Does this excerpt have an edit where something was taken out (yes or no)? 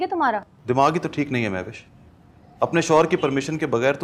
no